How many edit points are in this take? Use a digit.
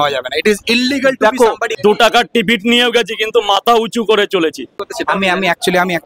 2